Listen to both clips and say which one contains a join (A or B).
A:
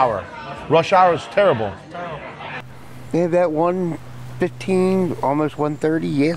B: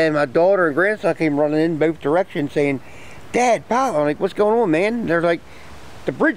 A